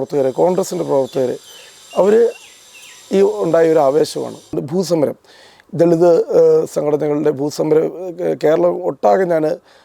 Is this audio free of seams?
no; 1 cut; at 4.5 s

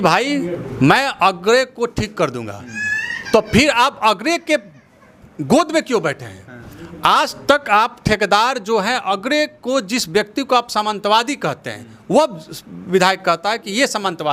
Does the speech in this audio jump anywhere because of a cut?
no; 0 cuts

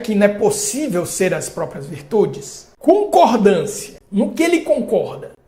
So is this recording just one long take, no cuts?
no; 1 cut; at 2.9 s

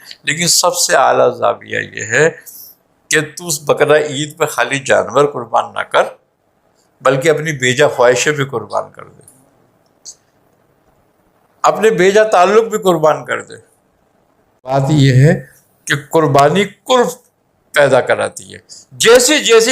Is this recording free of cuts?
no; 1 cut; at 14.7 s

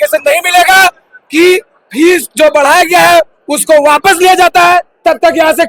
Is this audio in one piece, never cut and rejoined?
yes; 0 cuts

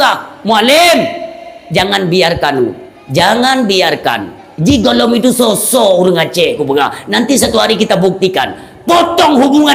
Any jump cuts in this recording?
no; 0 cuts

